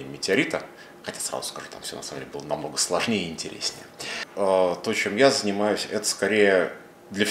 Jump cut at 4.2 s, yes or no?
yes